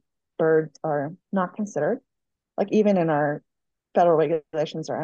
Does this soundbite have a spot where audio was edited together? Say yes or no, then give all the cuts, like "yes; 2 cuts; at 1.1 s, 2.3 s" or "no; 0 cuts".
yes; 1 cut; at 1.2 s